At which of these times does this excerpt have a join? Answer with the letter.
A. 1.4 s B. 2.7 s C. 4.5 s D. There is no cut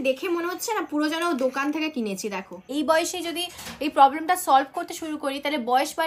B